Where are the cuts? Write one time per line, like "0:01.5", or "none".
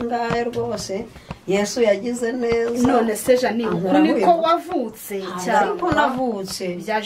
none